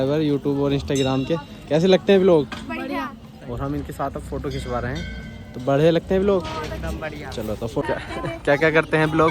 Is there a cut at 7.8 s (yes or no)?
yes